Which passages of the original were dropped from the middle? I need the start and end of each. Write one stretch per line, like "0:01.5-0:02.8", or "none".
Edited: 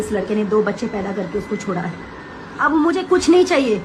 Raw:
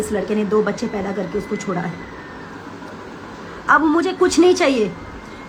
0:02.6-0:03.7